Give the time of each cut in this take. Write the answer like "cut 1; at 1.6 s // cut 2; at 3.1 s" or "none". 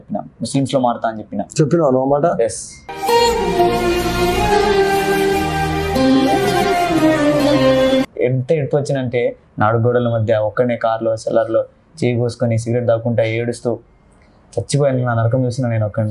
cut 1; at 8.1 s

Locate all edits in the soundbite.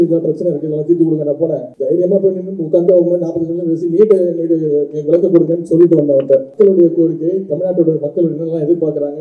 cut 1; at 1.7 s // cut 2; at 6.5 s

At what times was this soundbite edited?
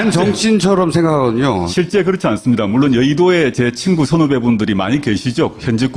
cut 1; at 2.4 s

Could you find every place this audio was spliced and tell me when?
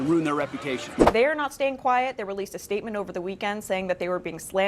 cut 1; at 0.9 s

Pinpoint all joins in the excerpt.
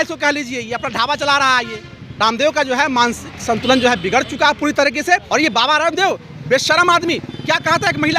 cut 1; at 2.1 s // cut 2; at 5.2 s

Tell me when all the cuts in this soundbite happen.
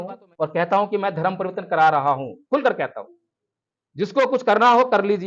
none

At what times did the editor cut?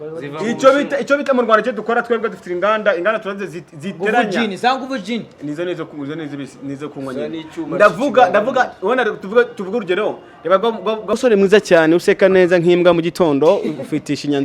cut 1; at 11.1 s

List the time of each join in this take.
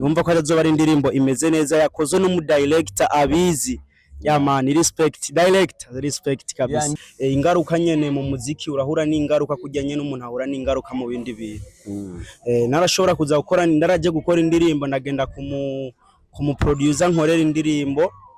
cut 1; at 6.9 s

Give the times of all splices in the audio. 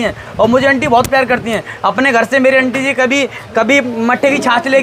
none

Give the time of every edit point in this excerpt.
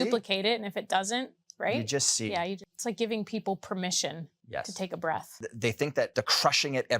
cut 1; at 2.6 s // cut 2; at 4.3 s // cut 3; at 5.4 s // cut 4; at 6.1 s

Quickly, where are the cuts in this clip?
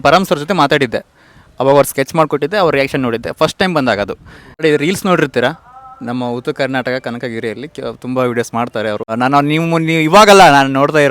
cut 1; at 4.6 s // cut 2; at 9.1 s

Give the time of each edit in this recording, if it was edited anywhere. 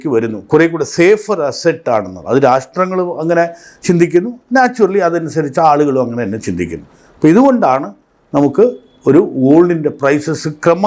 none

